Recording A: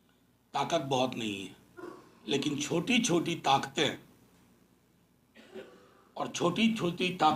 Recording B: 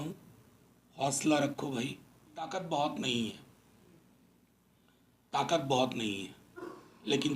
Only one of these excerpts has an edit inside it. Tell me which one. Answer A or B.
B